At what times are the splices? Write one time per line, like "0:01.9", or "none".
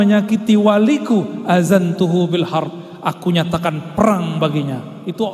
none

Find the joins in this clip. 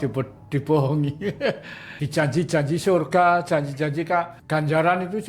0:01.9
0:04.4

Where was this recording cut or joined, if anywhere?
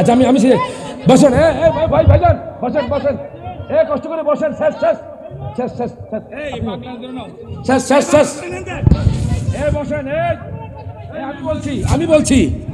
none

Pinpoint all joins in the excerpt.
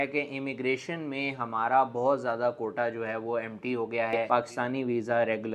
0:04.3

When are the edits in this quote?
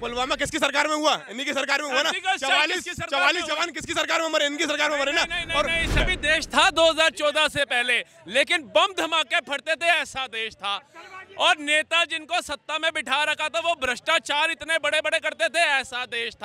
0:05.9

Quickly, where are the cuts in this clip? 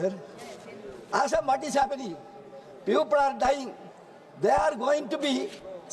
none

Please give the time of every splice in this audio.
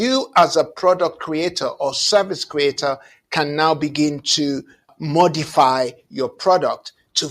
0:04.9

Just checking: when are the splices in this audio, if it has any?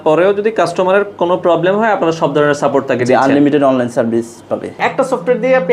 0:04.8

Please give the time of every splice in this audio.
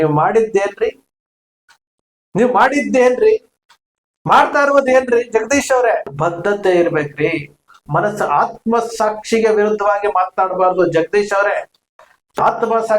0:06.1

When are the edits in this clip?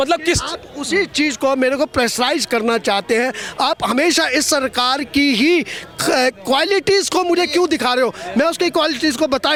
none

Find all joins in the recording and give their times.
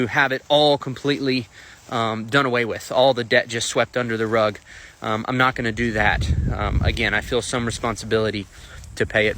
0:03.2
0:07.5

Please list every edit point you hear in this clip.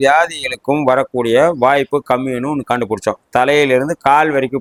none

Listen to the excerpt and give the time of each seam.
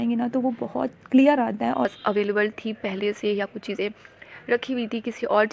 0:01.9

